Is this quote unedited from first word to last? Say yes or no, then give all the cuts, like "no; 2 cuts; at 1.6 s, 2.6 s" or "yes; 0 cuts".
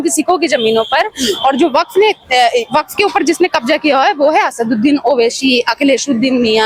yes; 0 cuts